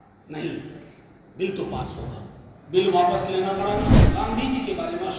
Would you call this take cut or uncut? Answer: cut